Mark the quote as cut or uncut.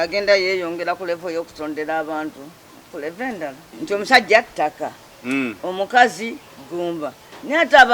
cut